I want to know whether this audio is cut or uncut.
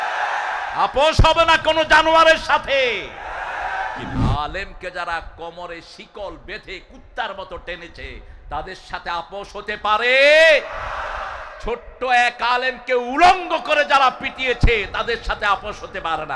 cut